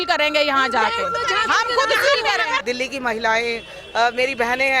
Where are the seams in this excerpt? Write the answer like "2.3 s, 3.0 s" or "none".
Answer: 2.6 s